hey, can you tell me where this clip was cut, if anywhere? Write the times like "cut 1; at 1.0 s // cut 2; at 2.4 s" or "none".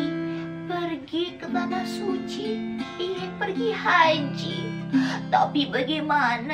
none

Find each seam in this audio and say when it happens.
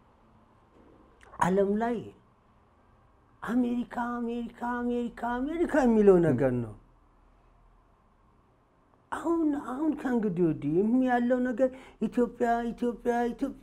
none

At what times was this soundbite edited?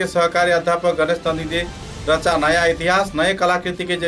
none

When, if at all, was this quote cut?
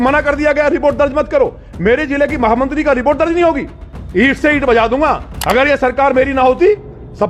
cut 1; at 5.3 s

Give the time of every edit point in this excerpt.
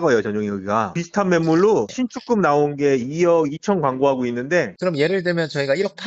cut 1; at 0.9 s // cut 2; at 4.8 s

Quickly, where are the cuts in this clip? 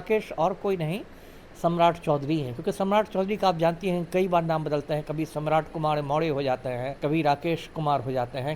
cut 1; at 6.9 s

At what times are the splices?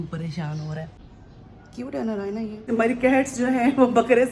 cut 1; at 0.9 s // cut 2; at 2.6 s

